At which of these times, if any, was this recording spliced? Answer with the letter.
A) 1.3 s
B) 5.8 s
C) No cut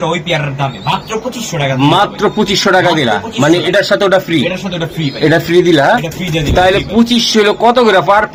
C